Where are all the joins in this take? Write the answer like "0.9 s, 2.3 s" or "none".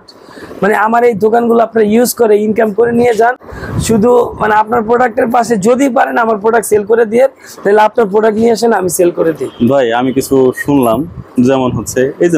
none